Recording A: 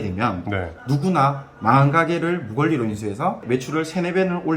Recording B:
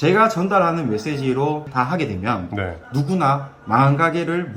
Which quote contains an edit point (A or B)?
A